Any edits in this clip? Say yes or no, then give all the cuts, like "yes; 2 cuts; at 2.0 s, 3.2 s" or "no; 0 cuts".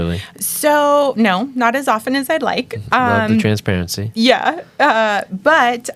no; 0 cuts